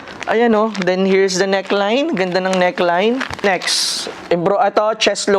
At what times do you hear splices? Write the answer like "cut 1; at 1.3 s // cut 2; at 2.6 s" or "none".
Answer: cut 1; at 3.4 s